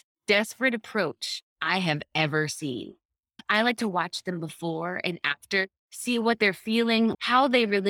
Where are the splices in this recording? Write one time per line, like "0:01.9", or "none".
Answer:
0:03.4
0:07.2